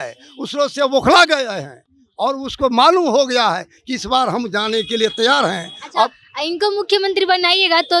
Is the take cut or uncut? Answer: uncut